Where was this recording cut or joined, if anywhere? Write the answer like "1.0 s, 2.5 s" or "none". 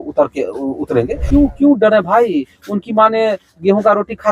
1.2 s